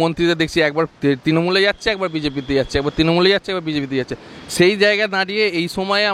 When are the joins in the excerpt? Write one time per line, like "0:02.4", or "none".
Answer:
none